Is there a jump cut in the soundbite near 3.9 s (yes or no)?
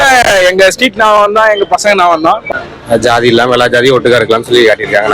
no